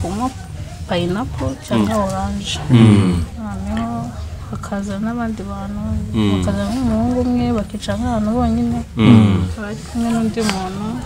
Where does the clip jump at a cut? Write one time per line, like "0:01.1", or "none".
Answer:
0:03.3